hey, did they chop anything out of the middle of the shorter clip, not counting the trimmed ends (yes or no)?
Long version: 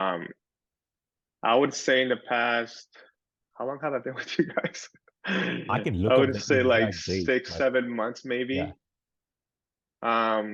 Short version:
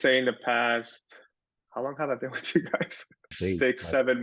yes